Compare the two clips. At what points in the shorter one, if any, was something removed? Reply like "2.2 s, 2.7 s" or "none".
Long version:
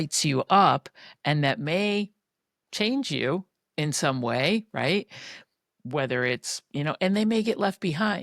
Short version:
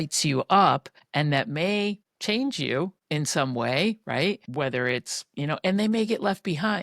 1.0 s, 2.1 s, 3.0 s, 4.4 s